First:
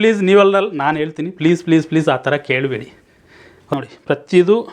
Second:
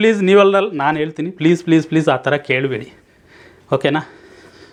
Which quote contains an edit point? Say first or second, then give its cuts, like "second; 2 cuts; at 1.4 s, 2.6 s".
first; 1 cut; at 3.7 s